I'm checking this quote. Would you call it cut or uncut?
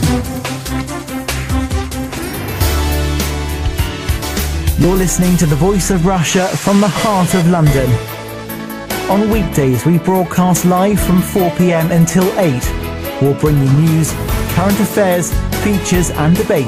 uncut